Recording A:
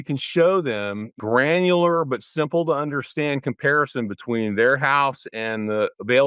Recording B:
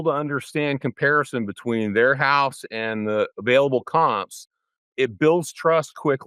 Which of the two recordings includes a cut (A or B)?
A